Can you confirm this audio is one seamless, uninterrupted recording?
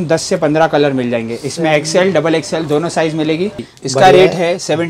no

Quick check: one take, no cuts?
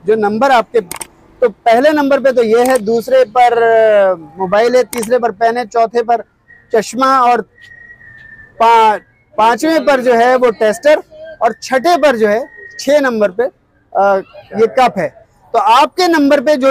yes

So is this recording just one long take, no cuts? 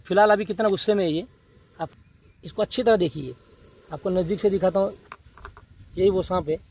no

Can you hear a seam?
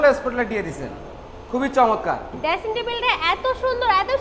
no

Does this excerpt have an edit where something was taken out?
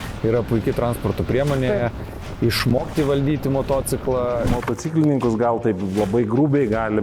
yes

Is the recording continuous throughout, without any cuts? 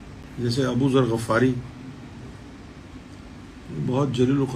yes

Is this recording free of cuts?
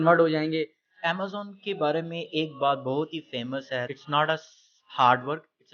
no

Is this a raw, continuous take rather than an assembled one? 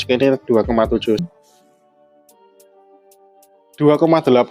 no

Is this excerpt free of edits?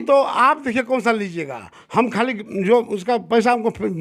yes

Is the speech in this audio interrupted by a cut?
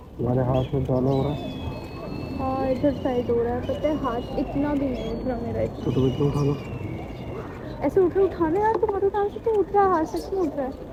no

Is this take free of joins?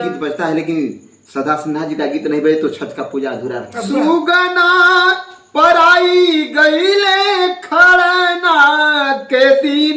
no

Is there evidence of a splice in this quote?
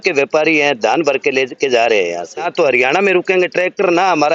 yes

